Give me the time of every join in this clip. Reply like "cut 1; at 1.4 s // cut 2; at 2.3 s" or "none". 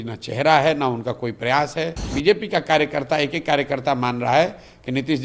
cut 1; at 2.1 s